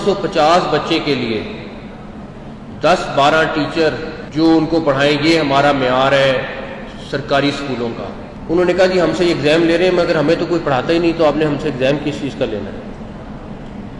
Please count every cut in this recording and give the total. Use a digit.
2